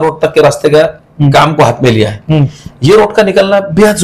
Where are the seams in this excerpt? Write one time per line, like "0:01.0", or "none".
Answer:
none